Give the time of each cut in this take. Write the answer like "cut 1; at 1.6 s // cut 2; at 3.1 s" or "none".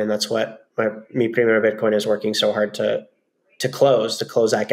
none